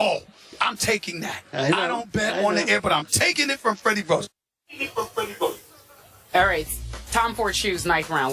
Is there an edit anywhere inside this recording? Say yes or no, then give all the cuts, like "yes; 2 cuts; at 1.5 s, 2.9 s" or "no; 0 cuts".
no; 0 cuts